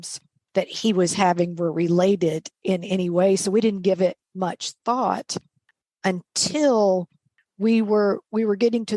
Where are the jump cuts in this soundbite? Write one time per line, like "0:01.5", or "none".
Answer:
0:05.6